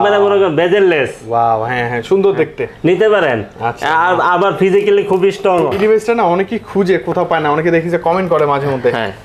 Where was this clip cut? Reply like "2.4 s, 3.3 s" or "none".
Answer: 5.7 s